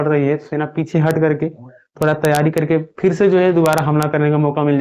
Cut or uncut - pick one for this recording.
uncut